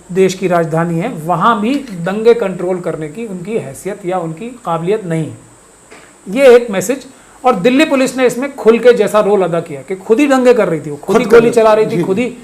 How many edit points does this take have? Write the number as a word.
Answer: zero